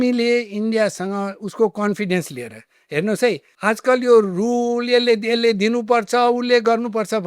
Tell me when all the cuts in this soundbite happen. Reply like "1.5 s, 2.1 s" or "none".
3.5 s